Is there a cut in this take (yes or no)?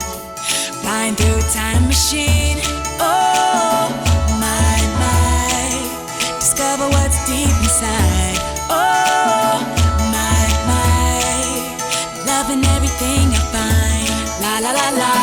no